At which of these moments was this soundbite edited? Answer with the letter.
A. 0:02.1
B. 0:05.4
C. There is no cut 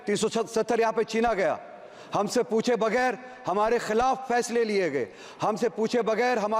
C